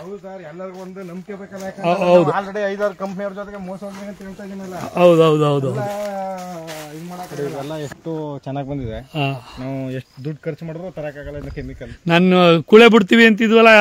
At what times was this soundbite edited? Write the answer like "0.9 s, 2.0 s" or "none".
7.3 s

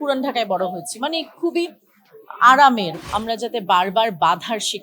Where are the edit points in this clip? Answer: 3.0 s

